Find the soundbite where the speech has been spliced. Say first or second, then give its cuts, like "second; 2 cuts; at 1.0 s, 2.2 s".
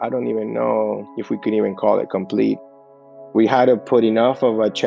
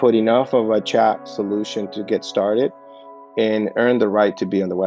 first; 1 cut; at 2.7 s